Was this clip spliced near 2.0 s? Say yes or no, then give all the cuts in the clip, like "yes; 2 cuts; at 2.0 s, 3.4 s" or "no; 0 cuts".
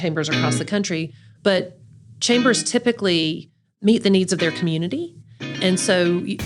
no; 1 cut; at 3.7 s